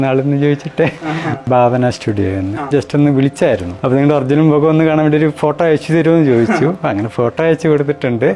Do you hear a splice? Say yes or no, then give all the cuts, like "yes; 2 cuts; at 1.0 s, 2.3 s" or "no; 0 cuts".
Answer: yes; 3 cuts; at 1.4 s, 2.7 s, 3.7 s